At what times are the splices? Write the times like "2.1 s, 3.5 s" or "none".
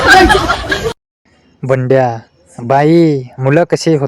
1.1 s